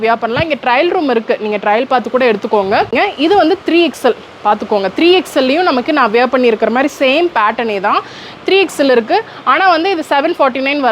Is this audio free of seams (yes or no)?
no